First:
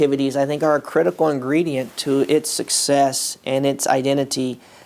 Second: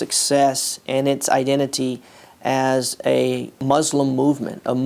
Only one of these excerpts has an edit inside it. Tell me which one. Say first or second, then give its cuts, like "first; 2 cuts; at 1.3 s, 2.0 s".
second; 1 cut; at 3.5 s